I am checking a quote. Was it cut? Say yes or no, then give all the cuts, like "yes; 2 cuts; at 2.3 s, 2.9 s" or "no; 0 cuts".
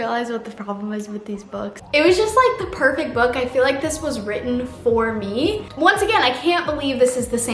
yes; 2 cuts; at 1.8 s, 5.7 s